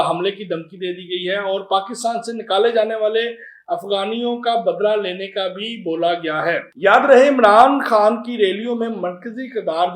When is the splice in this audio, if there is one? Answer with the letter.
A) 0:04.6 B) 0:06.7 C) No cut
C